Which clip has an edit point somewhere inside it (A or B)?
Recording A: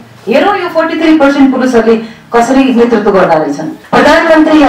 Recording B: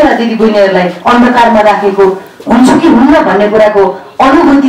A